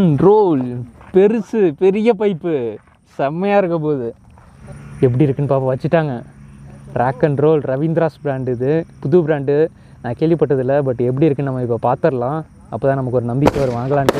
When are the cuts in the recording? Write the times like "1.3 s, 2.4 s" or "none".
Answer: 4.3 s